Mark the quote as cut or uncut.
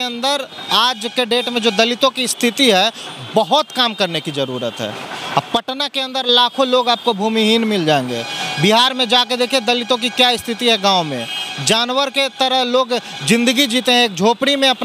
uncut